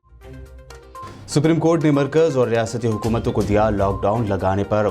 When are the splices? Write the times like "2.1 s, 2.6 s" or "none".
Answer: 1.0 s